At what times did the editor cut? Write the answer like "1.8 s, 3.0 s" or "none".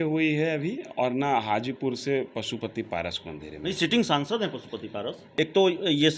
5.2 s